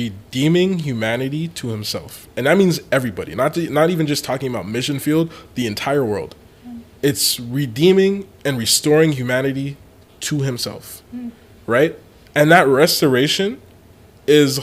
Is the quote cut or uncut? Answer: uncut